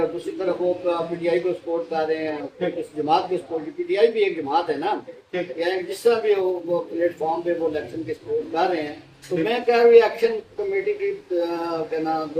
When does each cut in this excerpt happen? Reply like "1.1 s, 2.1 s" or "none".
none

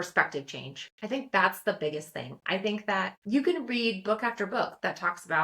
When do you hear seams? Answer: 3.2 s

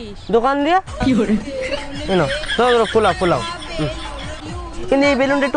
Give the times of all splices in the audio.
4.3 s

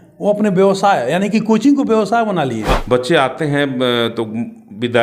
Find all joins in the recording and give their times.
2.7 s

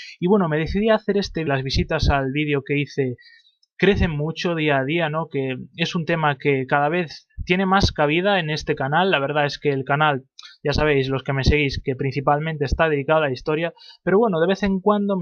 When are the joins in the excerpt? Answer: none

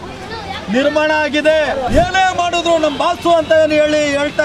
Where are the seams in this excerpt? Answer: 1.9 s

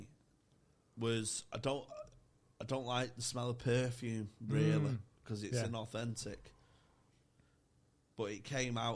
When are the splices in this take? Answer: none

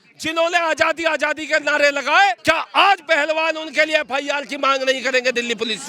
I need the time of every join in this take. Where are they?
2.4 s

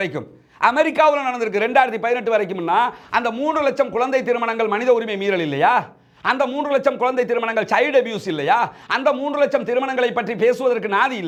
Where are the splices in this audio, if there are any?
none

